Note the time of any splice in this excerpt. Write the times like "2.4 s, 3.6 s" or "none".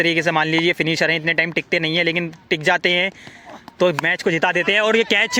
none